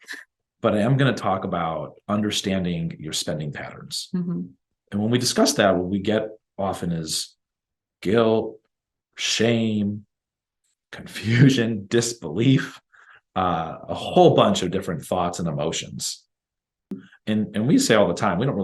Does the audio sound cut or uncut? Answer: cut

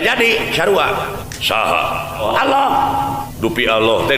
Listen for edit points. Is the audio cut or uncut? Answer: cut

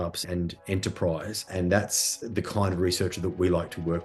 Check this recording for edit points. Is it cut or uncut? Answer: uncut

